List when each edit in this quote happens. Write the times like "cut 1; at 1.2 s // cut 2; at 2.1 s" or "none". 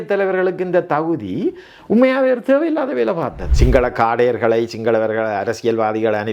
cut 1; at 3.4 s